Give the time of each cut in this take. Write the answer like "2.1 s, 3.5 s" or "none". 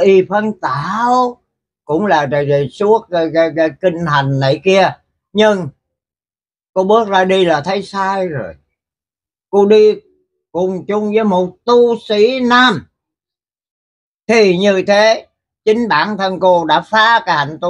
none